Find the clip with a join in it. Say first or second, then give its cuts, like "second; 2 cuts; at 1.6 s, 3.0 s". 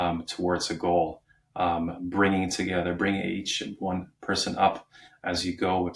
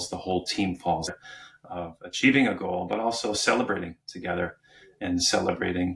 second; 1 cut; at 1.1 s